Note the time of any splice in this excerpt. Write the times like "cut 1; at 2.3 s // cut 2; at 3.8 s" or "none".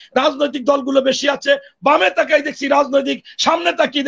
none

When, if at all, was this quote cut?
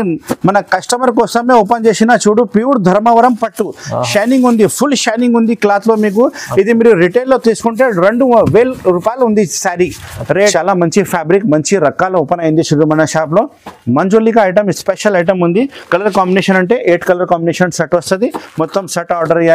cut 1; at 10.5 s

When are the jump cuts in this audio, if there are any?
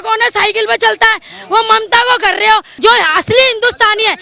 cut 1; at 2.7 s

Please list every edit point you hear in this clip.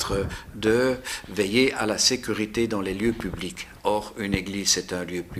none

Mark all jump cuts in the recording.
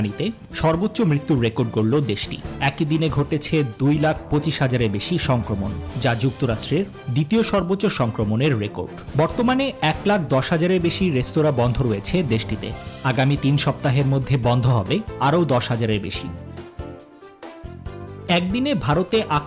cut 1; at 16.1 s // cut 2; at 18.3 s

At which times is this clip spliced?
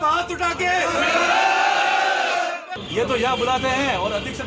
cut 1; at 2.6 s

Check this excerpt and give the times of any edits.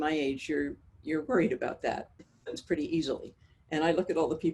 cut 1; at 2.2 s

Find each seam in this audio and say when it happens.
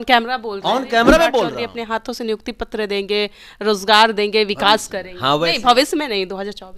cut 1; at 1.5 s

